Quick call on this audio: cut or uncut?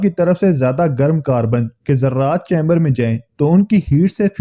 uncut